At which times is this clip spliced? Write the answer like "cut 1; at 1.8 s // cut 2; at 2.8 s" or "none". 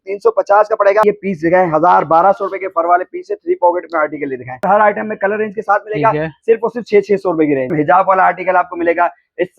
cut 1; at 1.0 s // cut 2; at 4.6 s // cut 3; at 7.7 s